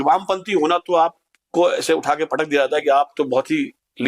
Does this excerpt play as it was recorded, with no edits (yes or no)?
yes